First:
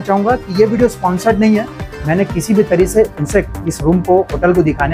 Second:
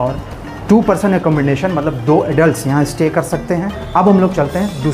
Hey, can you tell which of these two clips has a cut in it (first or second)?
second